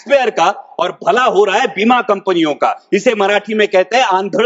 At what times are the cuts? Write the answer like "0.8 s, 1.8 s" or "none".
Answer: none